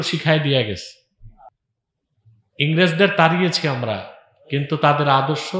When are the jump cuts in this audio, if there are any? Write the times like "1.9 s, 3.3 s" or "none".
1.5 s

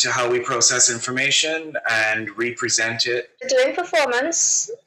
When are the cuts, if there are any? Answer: 3.4 s

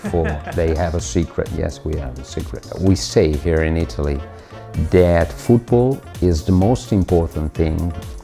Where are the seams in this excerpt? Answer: none

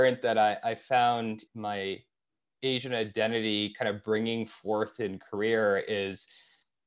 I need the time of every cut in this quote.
1.5 s

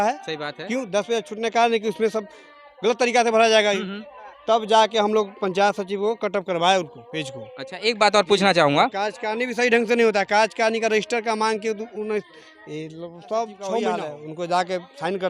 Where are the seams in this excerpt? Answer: 14.2 s

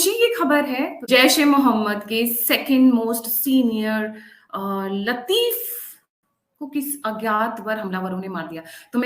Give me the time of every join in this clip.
1.0 s

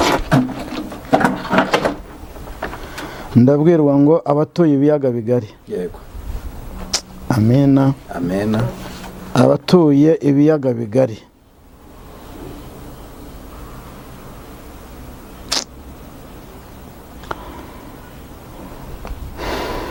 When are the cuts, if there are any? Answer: none

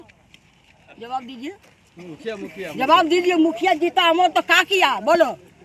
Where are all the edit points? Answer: none

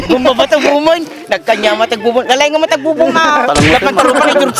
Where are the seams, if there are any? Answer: none

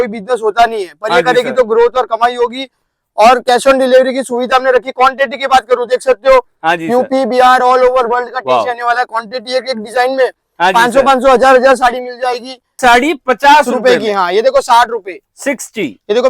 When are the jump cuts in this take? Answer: 12.8 s

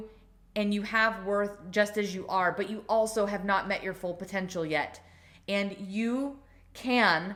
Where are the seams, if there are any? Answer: none

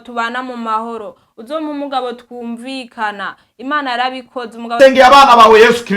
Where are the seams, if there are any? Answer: 4.7 s

